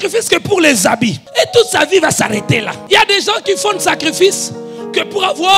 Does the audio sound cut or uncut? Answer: cut